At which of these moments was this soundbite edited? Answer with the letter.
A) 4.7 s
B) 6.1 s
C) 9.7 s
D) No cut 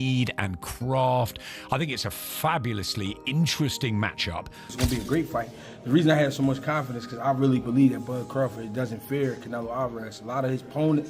A